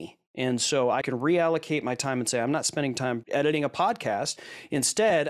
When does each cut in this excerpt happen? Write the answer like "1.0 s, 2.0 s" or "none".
1.0 s, 3.2 s